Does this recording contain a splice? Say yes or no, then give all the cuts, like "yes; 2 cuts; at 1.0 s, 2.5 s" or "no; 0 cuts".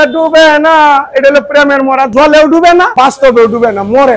no; 0 cuts